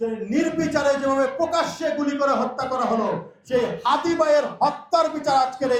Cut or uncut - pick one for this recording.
uncut